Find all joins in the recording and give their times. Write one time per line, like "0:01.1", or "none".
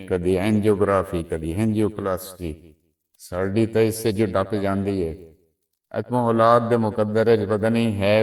none